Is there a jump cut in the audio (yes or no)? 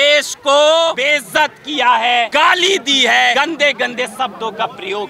yes